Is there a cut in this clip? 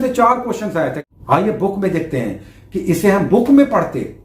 yes; 1 cut; at 1.0 s

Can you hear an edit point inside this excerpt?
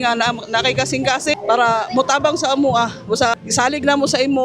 yes; 2 cuts; at 1.4 s, 3.4 s

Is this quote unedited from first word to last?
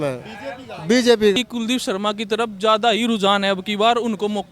no; 1 cut; at 1.4 s

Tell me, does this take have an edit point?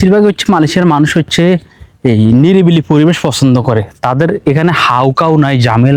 no; 0 cuts

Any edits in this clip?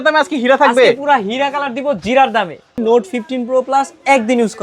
yes; 1 cut; at 2.8 s

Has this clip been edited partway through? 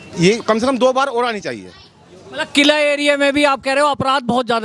no; 0 cuts

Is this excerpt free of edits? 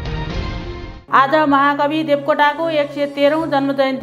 yes; 0 cuts

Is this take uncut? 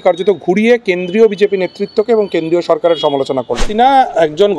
no; 1 cut; at 3.7 s

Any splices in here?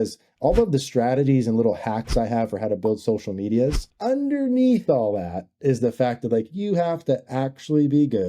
yes; 1 cut; at 3.9 s

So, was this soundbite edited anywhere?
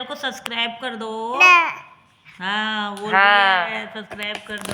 no; 0 cuts

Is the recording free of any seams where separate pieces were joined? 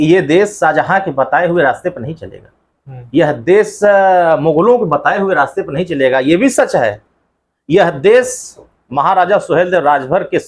yes; 0 cuts

